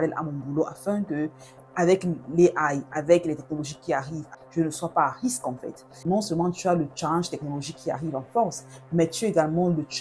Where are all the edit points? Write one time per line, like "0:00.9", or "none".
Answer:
0:04.3
0:06.0